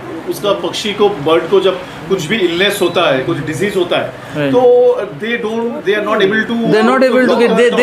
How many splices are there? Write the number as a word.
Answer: zero